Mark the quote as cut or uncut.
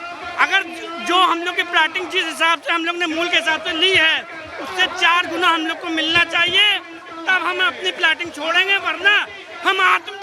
uncut